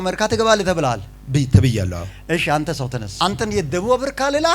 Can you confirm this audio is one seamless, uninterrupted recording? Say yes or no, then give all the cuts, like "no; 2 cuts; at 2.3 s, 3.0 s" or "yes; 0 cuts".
no; 1 cut; at 3.1 s